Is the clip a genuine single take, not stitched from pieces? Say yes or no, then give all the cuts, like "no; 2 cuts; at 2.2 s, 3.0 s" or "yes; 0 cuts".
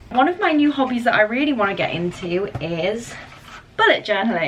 yes; 0 cuts